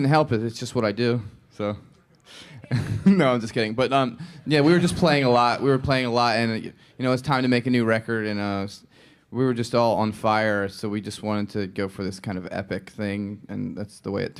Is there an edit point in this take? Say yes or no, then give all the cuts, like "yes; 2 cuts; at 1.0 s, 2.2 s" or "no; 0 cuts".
yes; 1 cut; at 7.6 s